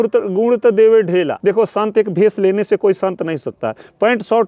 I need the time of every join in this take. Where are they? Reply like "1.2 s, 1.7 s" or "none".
1.3 s